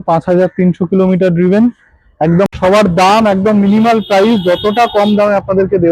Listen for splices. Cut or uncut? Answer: cut